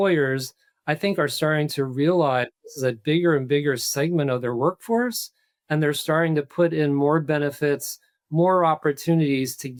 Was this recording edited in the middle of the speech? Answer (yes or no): no